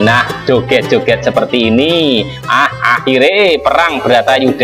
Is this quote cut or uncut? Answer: uncut